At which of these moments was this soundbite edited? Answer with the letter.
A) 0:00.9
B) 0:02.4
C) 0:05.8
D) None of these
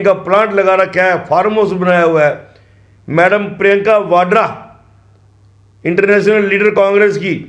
D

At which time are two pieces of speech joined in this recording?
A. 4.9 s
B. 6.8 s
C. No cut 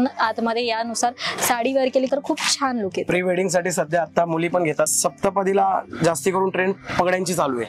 A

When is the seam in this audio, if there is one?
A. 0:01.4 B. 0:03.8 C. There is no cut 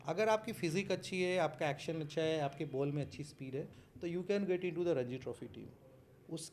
B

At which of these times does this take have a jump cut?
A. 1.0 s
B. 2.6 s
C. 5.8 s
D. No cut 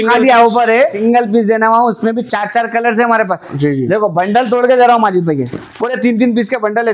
A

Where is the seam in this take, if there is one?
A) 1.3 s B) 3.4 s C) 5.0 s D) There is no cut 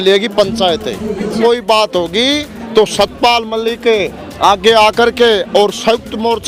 A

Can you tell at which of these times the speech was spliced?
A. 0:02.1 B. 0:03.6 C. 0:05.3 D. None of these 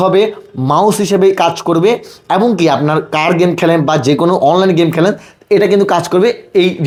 D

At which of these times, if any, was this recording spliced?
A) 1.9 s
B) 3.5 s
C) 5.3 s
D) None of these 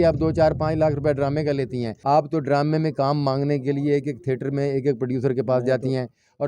A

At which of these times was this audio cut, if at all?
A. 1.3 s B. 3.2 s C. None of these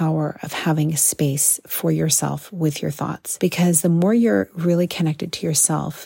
B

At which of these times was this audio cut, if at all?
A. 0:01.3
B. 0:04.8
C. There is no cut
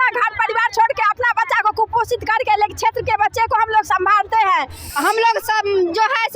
B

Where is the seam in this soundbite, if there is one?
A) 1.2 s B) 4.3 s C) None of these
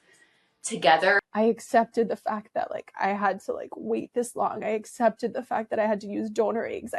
A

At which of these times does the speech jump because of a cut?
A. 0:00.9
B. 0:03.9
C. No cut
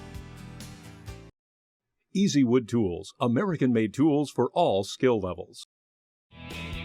A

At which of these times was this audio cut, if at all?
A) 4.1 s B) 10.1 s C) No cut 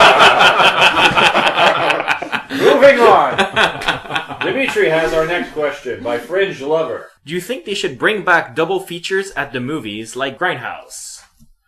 C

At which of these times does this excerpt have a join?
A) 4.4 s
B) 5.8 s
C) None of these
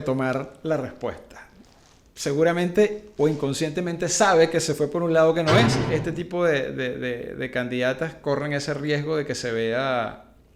B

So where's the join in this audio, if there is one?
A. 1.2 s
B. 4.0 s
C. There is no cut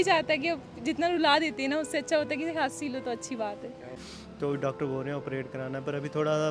B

